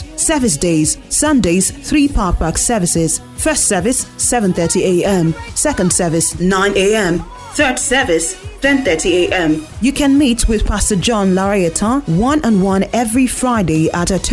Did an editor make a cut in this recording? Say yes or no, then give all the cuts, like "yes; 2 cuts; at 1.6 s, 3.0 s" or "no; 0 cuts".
yes; 1 cut; at 9.7 s